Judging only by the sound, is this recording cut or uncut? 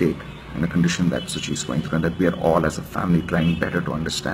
uncut